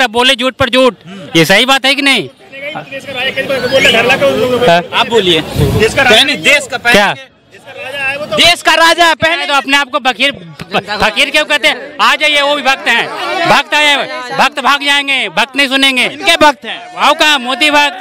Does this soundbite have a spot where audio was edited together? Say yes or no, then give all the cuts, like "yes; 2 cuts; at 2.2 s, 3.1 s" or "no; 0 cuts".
no; 0 cuts